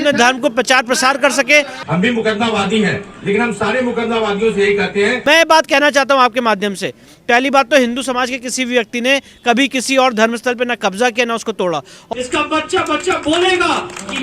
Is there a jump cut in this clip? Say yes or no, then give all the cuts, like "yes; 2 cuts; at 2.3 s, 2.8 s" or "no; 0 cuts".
yes; 3 cuts; at 1.8 s, 5.2 s, 11.9 s